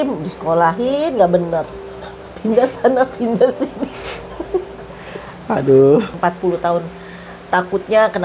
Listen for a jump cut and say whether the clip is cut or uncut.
cut